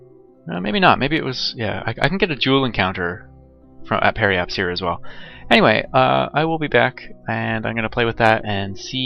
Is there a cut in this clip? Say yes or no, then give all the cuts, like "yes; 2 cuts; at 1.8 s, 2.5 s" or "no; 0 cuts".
no; 0 cuts